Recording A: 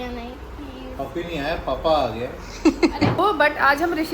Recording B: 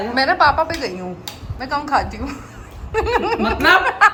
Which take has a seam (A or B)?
A